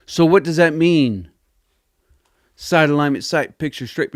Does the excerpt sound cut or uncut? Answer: uncut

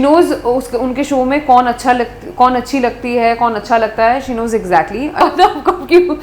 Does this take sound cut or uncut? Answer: cut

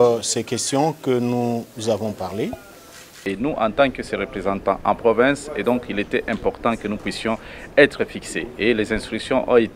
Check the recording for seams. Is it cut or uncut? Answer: cut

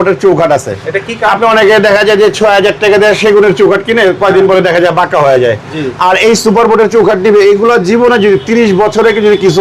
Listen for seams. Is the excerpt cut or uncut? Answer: uncut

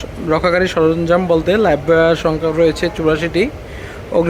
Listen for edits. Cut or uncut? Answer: uncut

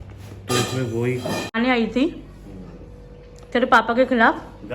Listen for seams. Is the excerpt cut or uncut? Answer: cut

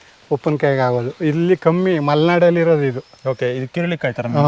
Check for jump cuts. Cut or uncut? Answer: uncut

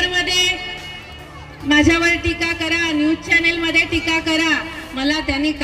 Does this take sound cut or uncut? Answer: uncut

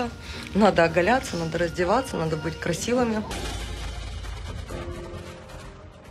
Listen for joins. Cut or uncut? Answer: cut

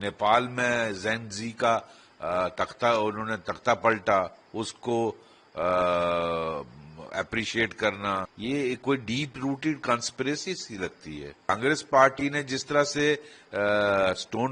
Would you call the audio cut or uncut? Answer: cut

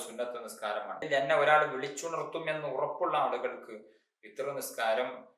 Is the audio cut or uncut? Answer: cut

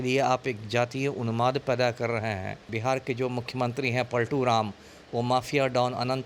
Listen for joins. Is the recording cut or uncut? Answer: cut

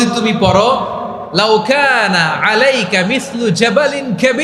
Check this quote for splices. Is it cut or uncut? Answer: uncut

